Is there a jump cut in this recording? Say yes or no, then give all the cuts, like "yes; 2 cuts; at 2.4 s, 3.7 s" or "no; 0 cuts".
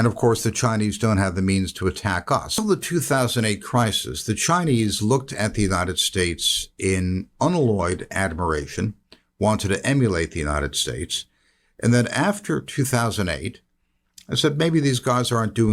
yes; 1 cut; at 2.5 s